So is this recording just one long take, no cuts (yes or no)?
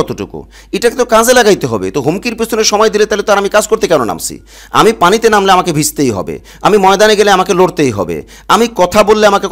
yes